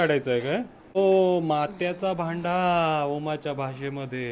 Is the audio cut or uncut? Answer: cut